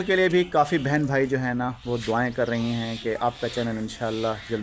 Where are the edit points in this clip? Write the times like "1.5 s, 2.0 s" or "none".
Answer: none